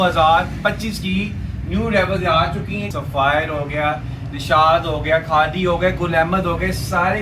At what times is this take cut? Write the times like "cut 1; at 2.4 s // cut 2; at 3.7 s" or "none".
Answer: cut 1; at 2.9 s